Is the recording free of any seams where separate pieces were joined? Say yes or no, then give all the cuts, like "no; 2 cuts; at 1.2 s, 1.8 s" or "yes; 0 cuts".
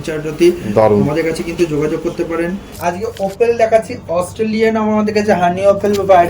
no; 1 cut; at 2.8 s